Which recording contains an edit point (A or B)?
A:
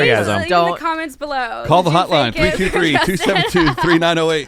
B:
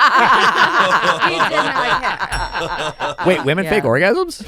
B